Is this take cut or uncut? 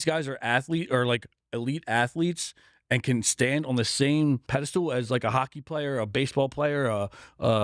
cut